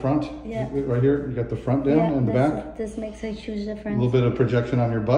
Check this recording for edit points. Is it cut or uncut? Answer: uncut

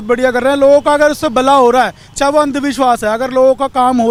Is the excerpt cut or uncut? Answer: uncut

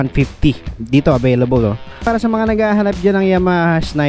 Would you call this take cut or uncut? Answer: cut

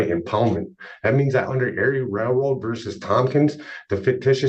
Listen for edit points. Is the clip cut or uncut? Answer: uncut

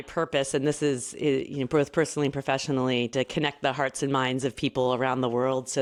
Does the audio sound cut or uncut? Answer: uncut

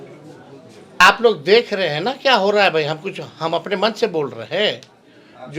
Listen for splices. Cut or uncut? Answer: cut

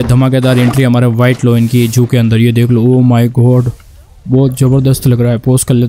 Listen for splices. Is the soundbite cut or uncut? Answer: uncut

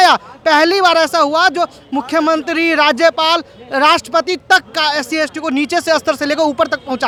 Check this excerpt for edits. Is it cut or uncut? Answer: uncut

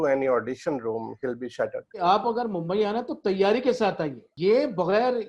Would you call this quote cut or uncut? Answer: cut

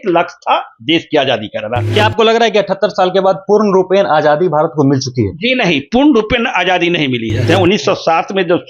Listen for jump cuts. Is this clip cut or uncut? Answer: cut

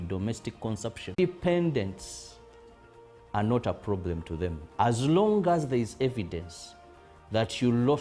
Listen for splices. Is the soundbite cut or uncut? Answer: cut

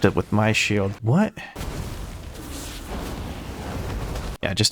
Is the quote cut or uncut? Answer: cut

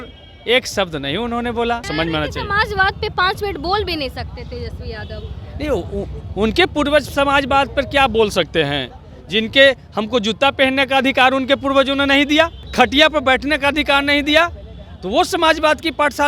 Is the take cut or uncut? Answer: cut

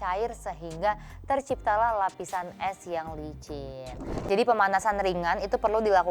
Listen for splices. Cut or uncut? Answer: cut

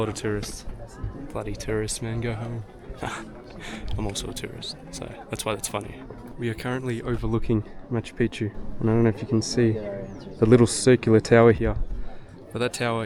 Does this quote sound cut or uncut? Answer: uncut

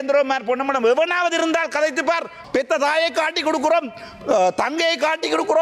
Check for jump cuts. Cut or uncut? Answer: cut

